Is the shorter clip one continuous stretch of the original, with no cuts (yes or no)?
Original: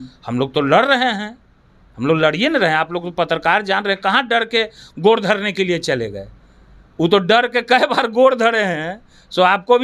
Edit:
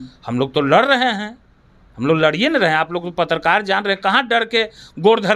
yes